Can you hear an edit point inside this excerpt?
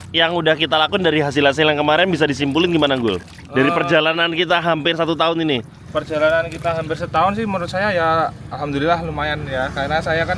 no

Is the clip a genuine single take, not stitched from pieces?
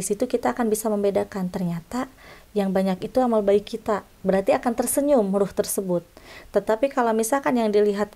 yes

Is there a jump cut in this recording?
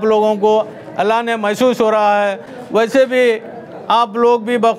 no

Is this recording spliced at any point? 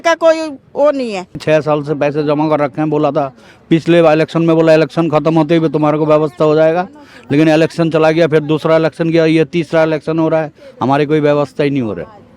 yes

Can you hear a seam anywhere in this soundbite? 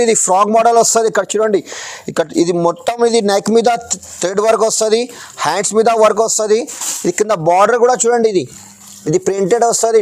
no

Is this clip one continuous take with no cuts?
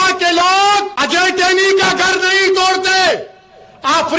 no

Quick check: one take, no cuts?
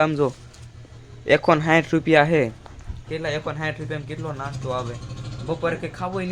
yes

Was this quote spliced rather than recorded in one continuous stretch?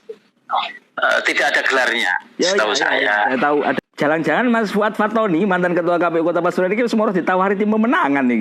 yes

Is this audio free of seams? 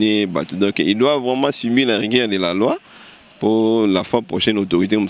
yes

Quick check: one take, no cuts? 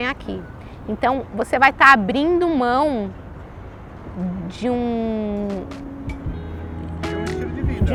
yes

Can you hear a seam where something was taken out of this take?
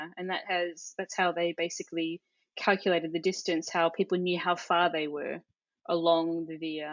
no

